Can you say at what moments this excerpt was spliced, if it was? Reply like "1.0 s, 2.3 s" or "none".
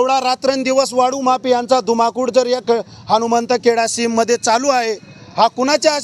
none